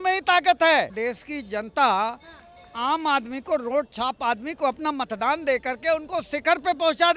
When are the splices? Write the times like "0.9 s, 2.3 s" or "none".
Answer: 0.9 s